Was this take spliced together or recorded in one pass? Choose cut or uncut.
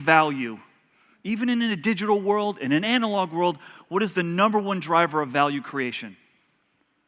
cut